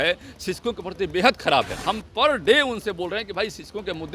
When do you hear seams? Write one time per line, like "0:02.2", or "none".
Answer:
0:01.7